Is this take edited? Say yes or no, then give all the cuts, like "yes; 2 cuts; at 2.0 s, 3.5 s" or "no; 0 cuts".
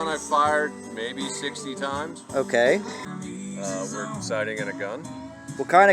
yes; 1 cut; at 3.0 s